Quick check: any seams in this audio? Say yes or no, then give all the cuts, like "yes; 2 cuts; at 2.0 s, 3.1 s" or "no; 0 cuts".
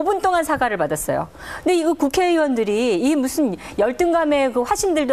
yes; 1 cut; at 3.2 s